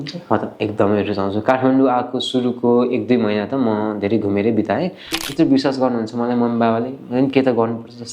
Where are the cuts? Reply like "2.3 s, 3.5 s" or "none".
5.1 s